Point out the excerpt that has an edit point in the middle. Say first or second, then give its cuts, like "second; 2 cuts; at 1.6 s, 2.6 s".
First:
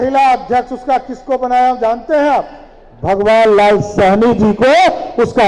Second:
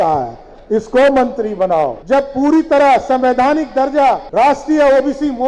second; 2 cuts; at 2.0 s, 4.2 s